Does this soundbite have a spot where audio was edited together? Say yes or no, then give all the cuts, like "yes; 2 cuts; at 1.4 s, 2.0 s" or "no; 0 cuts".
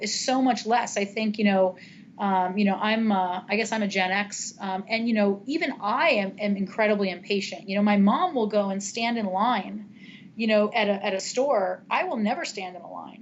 no; 0 cuts